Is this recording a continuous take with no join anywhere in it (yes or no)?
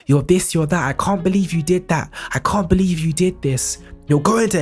yes